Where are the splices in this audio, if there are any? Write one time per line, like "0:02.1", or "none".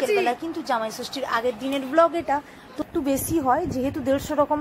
0:02.8